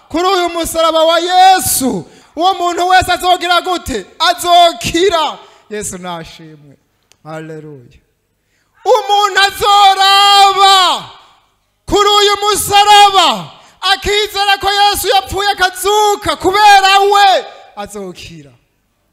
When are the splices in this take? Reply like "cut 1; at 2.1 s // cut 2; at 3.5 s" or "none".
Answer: cut 1; at 2.2 s